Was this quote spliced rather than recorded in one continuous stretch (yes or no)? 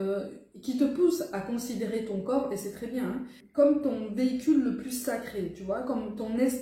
yes